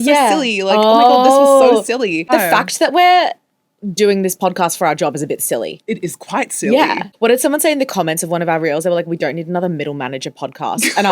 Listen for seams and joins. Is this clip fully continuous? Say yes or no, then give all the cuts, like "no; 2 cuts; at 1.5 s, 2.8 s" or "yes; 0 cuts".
no; 2 cuts; at 2.3 s, 7.1 s